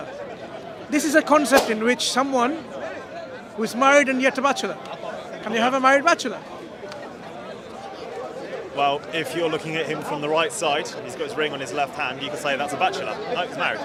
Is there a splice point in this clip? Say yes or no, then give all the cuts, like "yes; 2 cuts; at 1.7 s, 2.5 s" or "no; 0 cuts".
no; 0 cuts